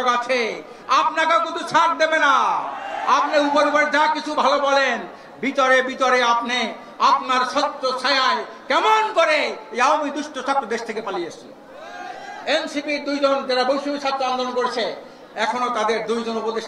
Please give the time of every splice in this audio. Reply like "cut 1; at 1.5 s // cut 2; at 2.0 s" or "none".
none